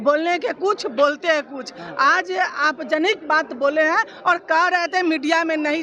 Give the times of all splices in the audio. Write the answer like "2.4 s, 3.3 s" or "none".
none